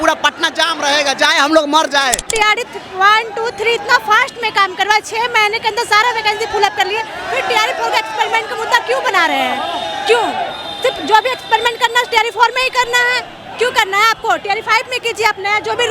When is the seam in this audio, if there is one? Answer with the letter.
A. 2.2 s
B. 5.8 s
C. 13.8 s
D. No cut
A